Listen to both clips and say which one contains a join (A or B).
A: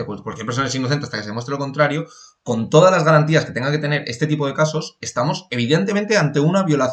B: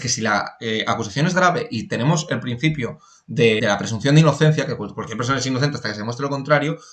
B